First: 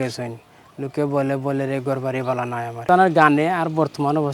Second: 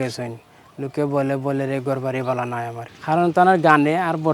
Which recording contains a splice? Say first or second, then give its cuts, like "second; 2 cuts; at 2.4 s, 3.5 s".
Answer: first; 1 cut; at 2.9 s